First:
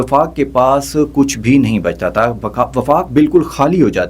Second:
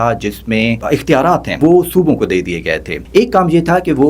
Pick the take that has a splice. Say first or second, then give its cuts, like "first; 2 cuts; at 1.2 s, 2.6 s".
second; 2 cuts; at 1.5 s, 3.0 s